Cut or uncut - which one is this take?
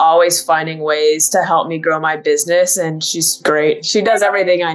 cut